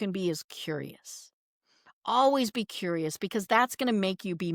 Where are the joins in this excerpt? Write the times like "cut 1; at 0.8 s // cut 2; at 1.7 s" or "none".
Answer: none